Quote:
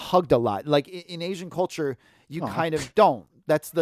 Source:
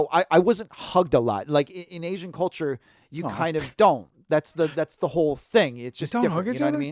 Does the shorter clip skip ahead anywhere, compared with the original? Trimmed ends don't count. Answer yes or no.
no